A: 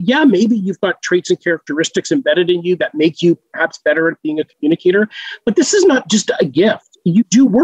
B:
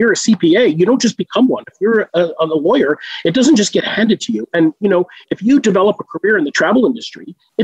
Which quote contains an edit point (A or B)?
B